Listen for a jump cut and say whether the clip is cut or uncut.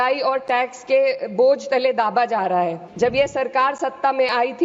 cut